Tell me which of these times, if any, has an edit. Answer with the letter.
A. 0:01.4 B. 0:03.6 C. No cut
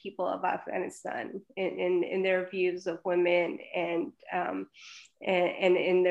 C